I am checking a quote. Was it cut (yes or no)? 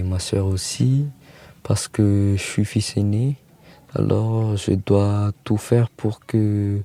no